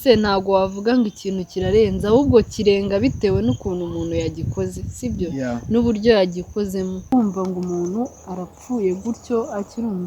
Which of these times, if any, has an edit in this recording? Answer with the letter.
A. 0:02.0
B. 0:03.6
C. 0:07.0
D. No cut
C